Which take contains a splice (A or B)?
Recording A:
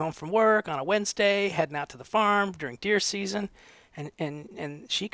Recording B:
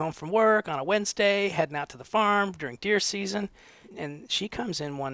B